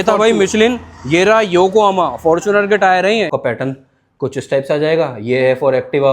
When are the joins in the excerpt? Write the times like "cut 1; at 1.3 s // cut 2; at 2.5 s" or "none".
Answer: cut 1; at 3.3 s